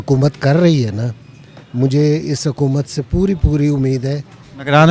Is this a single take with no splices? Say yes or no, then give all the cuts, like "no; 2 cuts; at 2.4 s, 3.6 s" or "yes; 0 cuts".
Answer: yes; 0 cuts